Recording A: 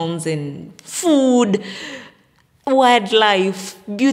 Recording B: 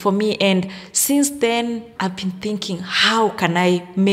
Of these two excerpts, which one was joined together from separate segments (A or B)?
B